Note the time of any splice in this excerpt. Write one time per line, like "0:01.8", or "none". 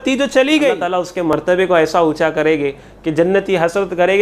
0:01.3